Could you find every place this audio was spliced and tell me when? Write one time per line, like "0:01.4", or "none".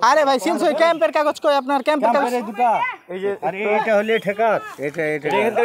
none